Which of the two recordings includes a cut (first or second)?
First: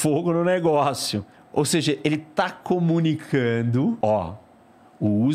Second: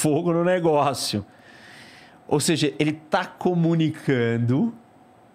first